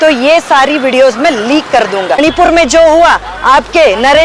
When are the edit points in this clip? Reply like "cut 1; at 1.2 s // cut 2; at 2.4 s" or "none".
cut 1; at 2.2 s